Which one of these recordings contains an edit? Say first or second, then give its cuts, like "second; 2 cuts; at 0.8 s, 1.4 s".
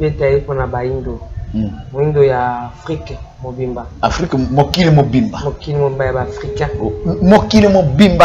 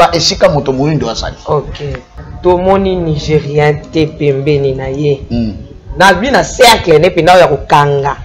second; 1 cut; at 2.1 s